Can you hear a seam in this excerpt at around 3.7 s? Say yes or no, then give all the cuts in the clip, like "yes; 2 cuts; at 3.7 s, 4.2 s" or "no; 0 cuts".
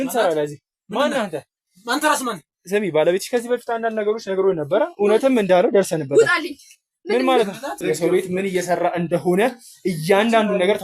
no; 1 cut; at 7.8 s